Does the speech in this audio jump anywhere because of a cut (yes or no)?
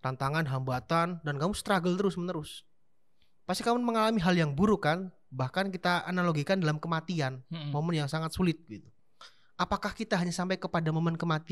no